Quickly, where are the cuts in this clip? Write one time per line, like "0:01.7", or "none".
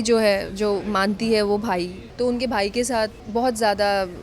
0:02.0
0:03.2